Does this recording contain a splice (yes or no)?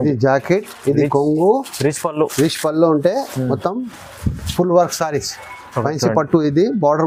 no